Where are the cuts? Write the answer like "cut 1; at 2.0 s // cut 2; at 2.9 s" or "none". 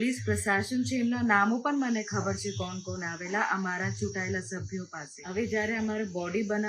cut 1; at 5.2 s